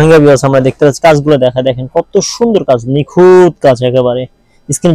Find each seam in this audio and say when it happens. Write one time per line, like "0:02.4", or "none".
none